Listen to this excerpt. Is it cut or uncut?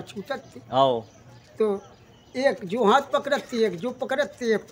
uncut